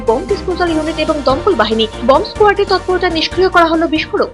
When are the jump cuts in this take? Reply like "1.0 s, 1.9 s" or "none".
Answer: none